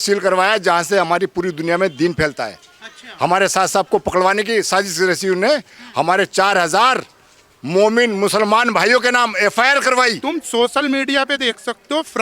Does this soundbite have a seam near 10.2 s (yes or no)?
yes